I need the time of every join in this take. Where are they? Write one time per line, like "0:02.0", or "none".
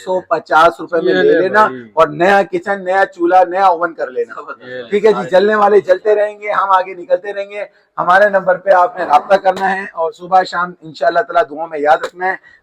none